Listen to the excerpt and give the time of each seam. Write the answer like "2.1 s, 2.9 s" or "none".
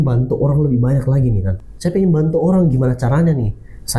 1.5 s